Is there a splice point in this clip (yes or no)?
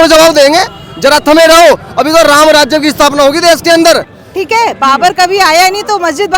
yes